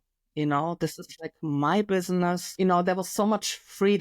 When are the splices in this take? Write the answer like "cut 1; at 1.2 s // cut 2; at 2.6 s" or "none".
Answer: cut 1; at 2.5 s